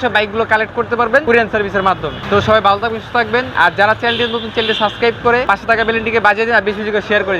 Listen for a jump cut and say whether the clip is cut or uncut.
cut